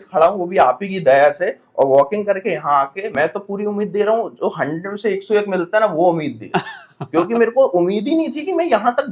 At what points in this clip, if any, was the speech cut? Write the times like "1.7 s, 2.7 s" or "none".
3.1 s